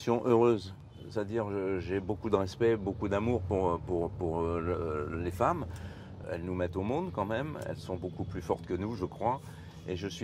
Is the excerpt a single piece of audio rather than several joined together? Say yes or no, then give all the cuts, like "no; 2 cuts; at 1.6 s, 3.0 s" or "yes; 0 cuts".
yes; 0 cuts